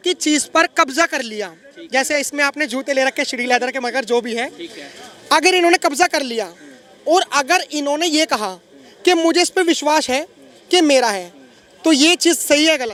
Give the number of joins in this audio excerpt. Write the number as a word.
zero